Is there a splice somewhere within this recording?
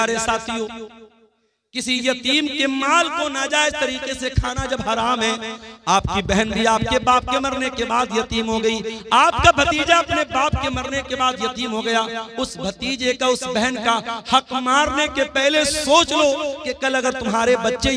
no; 0 cuts

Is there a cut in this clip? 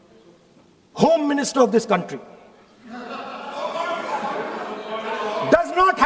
no; 0 cuts

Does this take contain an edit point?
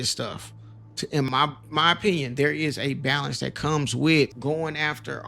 yes; 2 cuts; at 1.3 s, 4.4 s

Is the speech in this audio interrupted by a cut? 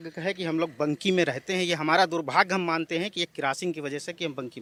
no; 0 cuts

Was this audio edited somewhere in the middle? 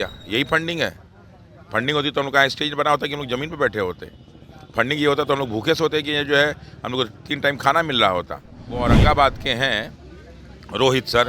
yes; 1 cut; at 8.9 s

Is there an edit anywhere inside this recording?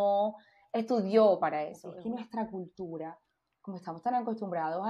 yes; 1 cut; at 1.9 s

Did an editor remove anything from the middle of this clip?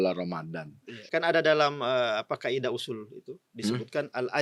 yes; 1 cut; at 1.1 s

